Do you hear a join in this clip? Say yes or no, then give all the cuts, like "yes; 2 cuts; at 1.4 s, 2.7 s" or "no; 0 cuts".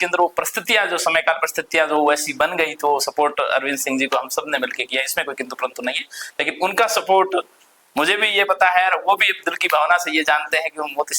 no; 0 cuts